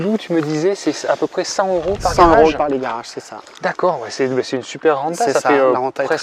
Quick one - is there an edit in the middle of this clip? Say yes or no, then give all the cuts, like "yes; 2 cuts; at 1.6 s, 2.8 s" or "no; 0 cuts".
no; 0 cuts